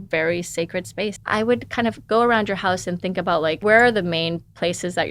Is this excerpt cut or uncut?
cut